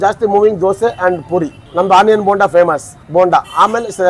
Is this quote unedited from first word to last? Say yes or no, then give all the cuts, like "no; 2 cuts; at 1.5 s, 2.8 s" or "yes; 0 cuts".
yes; 0 cuts